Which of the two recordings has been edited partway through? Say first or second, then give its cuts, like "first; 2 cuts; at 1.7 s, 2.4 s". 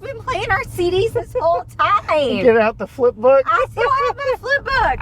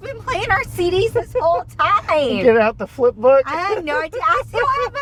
first; 1 cut; at 3.5 s